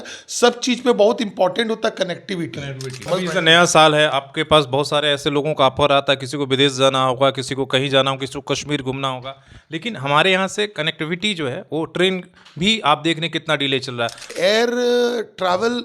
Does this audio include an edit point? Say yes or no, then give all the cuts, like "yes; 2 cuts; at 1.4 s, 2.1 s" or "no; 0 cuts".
yes; 2 cuts; at 3.1 s, 14.3 s